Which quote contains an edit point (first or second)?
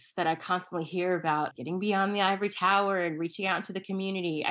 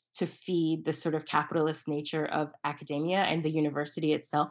first